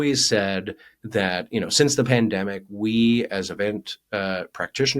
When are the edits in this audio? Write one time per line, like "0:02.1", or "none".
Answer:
0:00.9